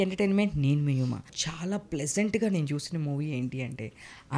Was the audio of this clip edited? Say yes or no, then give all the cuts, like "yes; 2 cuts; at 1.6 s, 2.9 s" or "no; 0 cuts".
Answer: yes; 1 cut; at 1.4 s